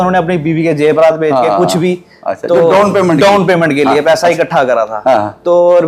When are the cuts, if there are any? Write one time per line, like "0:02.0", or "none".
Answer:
none